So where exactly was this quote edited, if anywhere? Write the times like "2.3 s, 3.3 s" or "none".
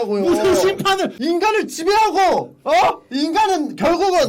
1.1 s